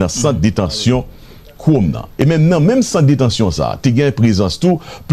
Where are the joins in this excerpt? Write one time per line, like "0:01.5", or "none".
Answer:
none